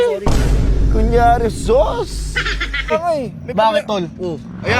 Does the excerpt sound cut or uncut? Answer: cut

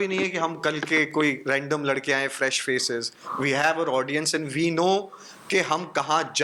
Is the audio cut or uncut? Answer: uncut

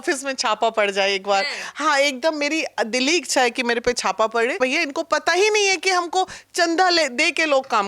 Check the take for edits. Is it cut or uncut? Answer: cut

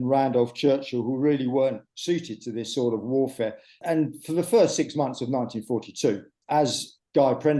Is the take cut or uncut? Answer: cut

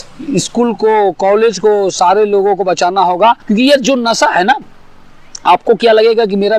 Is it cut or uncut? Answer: cut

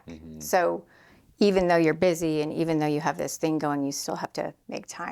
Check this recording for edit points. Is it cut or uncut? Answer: uncut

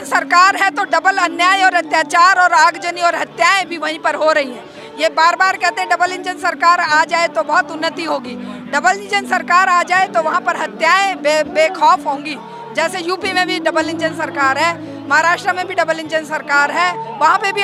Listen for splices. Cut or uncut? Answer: uncut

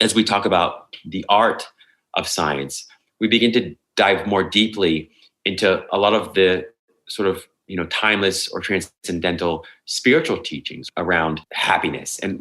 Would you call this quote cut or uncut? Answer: cut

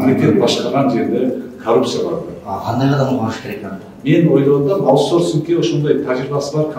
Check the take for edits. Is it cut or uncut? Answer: uncut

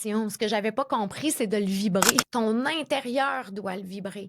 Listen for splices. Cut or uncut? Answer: cut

